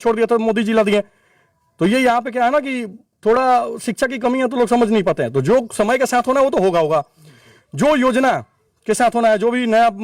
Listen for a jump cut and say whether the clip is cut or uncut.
uncut